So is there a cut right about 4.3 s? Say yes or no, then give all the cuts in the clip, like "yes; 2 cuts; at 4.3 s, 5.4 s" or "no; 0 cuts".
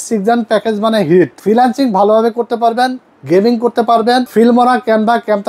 yes; 2 cuts; at 1.4 s, 4.3 s